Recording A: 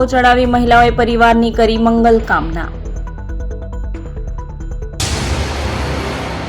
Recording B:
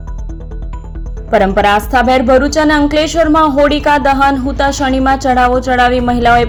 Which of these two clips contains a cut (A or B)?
A